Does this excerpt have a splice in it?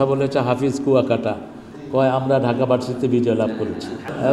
no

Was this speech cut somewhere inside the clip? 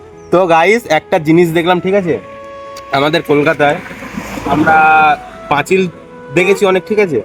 no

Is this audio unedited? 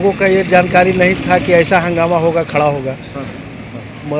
yes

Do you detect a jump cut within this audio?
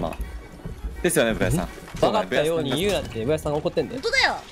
yes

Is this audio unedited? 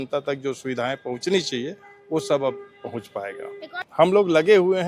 no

